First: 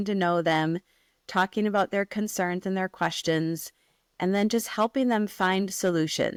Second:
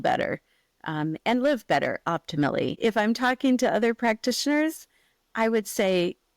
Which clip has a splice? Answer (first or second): second